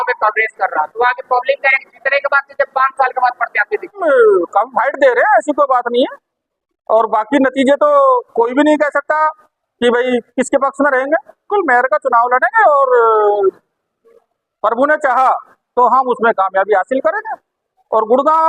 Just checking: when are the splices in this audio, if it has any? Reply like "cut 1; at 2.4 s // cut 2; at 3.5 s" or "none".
cut 1; at 4.0 s // cut 2; at 11.5 s